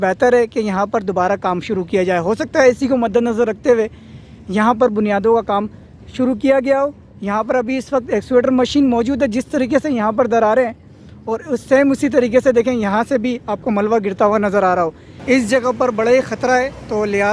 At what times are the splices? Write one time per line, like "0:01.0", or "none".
0:15.1